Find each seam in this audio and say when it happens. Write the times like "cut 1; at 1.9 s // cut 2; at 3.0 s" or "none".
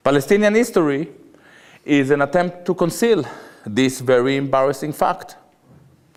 none

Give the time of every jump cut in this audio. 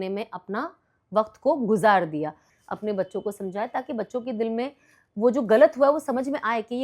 cut 1; at 2.5 s

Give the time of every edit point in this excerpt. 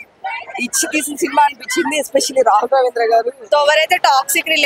cut 1; at 3.4 s

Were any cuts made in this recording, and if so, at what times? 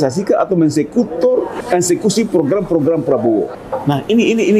cut 1; at 1.6 s // cut 2; at 3.6 s

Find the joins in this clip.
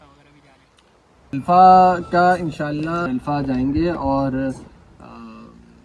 cut 1; at 1.3 s // cut 2; at 3.1 s

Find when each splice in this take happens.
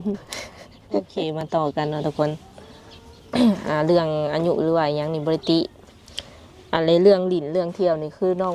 cut 1; at 1.1 s

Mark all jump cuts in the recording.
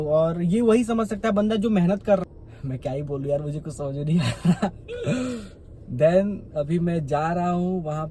cut 1; at 2.2 s

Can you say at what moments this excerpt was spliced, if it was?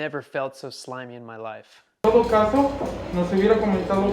cut 1; at 1.9 s

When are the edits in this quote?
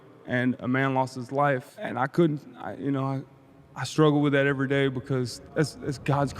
cut 1; at 1.7 s // cut 2; at 5.4 s

